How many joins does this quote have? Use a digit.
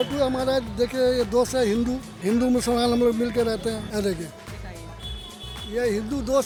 0